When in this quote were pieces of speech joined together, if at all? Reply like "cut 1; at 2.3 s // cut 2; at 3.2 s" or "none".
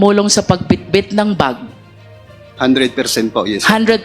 none

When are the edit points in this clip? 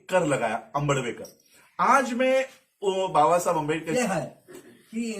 cut 1; at 3.9 s

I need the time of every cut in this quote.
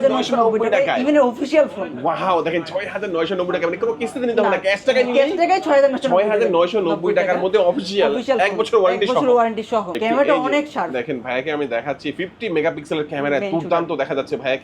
cut 1; at 10.0 s

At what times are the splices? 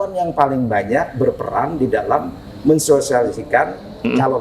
none

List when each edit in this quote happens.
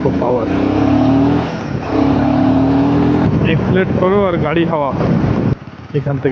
cut 1; at 3.3 s // cut 2; at 5.5 s

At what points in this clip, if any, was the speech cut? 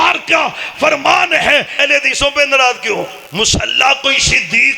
cut 1; at 1.8 s // cut 2; at 3.2 s

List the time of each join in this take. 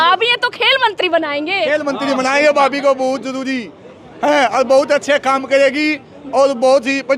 none

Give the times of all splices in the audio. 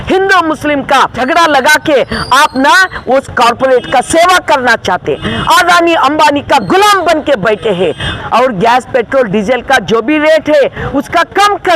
cut 1; at 1.2 s // cut 2; at 8.1 s

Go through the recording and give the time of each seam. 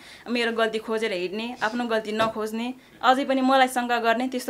none

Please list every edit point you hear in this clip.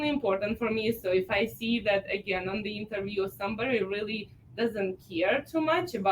none

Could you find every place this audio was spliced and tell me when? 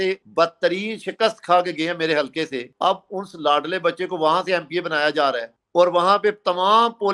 none

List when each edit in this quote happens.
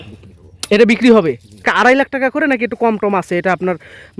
cut 1; at 1.6 s

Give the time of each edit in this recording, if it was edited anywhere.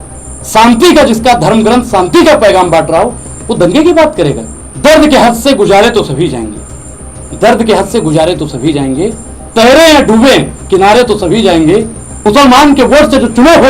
cut 1; at 4.9 s // cut 2; at 12.0 s

